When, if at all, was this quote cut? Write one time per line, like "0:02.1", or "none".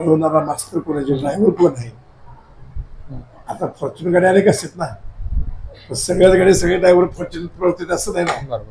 none

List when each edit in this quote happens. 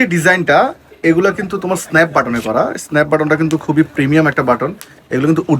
none

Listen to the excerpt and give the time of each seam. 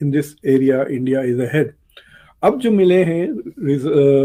none

